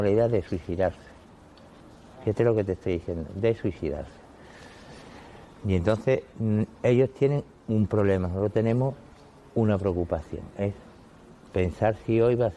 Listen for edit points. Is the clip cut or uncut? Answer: uncut